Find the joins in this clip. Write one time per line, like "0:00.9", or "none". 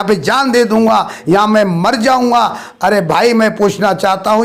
none